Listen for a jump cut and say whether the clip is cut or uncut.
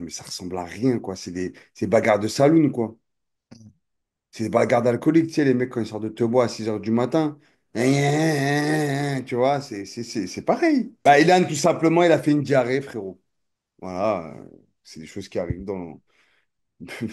cut